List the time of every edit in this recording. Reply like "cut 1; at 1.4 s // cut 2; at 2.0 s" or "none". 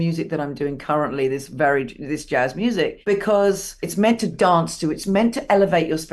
cut 1; at 3.0 s // cut 2; at 3.8 s